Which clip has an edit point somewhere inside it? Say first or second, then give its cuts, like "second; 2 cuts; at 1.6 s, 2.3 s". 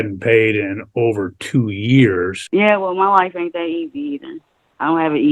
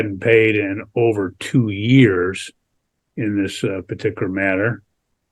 first; 1 cut; at 2.4 s